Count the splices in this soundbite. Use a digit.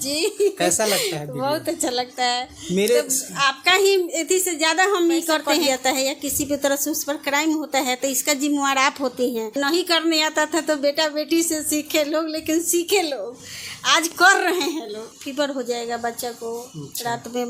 3